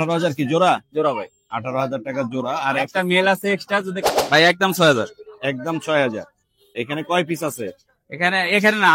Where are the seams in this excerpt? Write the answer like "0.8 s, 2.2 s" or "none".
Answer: 4.0 s